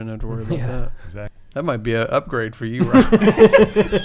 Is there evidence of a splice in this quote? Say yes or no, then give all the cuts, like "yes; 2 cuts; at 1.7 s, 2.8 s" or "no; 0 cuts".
yes; 1 cut; at 1.4 s